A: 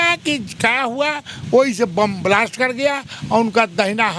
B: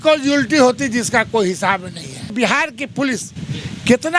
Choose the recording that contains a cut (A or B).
B